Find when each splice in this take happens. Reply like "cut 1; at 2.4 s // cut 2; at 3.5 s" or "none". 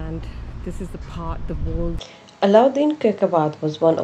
cut 1; at 2.2 s